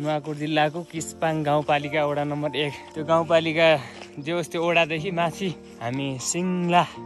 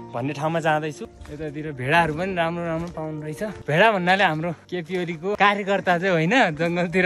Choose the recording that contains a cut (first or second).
second